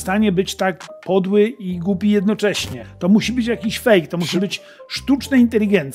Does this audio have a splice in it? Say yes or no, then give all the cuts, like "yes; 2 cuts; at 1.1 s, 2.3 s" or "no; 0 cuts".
yes; 1 cut; at 2.8 s